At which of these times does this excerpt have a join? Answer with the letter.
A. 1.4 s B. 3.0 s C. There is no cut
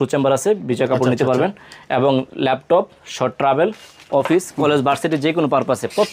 C